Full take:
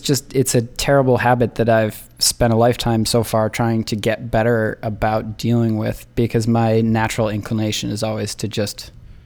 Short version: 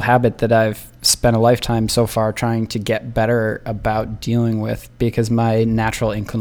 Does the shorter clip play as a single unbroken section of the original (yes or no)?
yes